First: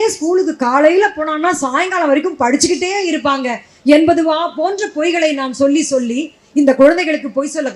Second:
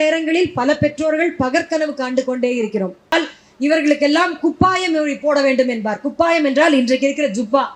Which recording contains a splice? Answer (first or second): second